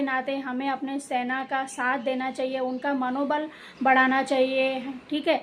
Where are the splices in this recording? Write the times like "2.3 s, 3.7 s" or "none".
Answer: none